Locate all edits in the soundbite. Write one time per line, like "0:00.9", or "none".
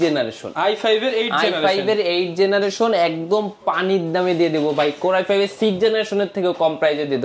none